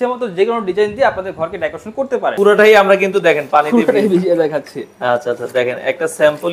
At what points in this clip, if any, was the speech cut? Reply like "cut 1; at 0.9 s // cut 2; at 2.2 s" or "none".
cut 1; at 2.3 s